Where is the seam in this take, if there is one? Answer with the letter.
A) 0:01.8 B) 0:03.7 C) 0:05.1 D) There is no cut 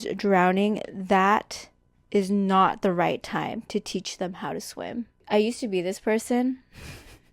C